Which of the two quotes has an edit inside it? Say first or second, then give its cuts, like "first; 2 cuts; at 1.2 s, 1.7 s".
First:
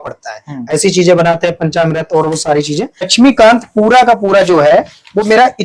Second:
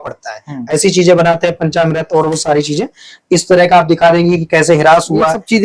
first; 1 cut; at 3.1 s